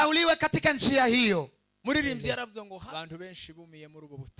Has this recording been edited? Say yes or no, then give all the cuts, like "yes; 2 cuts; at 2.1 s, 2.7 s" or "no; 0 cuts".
yes; 1 cut; at 2.6 s